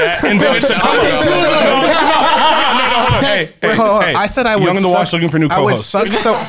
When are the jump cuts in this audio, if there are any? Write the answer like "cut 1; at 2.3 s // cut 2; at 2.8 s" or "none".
cut 1; at 3.2 s

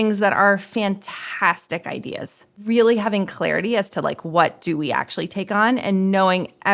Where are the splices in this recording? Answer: cut 1; at 2.6 s

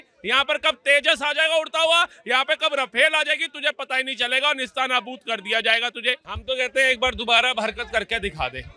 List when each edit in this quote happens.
cut 1; at 6.3 s

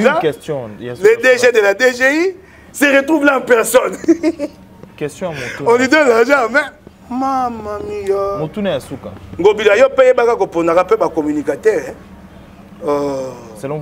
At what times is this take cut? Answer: none

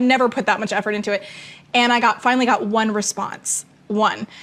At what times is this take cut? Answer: cut 1; at 2.8 s

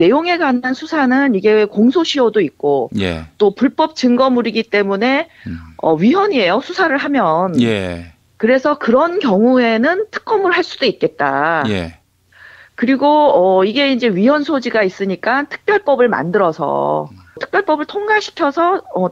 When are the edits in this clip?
cut 1; at 7.2 s

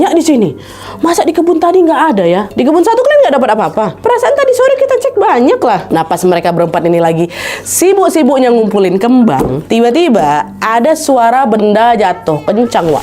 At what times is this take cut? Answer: cut 1; at 2.5 s // cut 2; at 5.8 s // cut 3; at 9.6 s

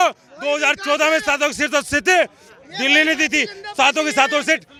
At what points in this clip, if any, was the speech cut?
none

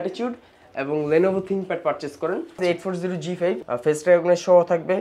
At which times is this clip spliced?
cut 1; at 2.6 s // cut 2; at 3.6 s

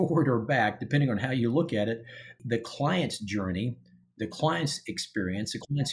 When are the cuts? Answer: cut 1; at 2.4 s

